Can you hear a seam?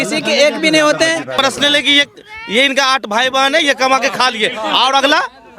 yes; 1 cut; at 1.3 s

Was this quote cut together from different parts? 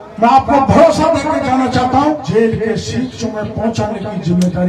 yes; 1 cut; at 2.2 s

